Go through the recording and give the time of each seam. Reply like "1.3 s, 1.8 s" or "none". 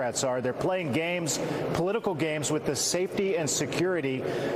none